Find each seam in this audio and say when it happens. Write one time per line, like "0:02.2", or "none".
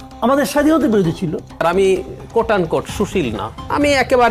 0:01.5